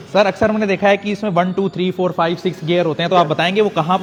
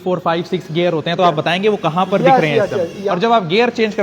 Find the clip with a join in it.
second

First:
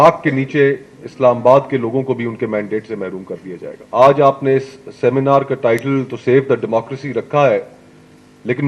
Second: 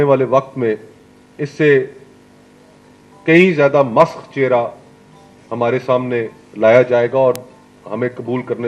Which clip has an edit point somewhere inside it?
first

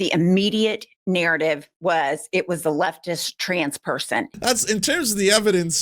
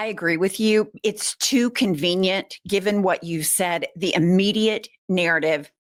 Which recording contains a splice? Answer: first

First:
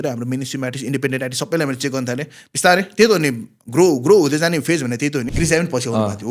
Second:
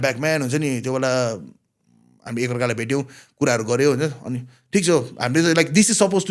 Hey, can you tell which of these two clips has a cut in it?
first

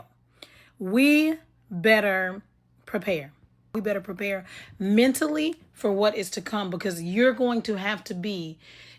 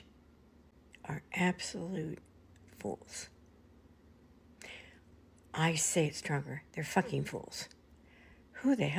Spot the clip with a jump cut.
first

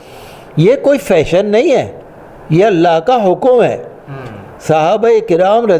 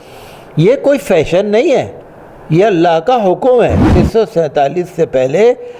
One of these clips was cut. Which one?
second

